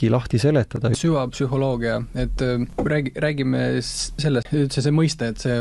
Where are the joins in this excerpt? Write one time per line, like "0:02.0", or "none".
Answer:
0:01.0
0:02.7
0:04.5